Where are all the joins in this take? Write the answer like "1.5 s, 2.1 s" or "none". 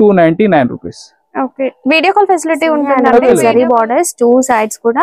3.3 s